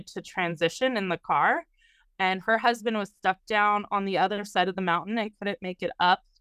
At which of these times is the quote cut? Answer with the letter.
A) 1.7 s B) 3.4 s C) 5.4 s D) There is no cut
D